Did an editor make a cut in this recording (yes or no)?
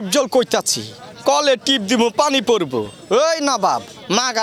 no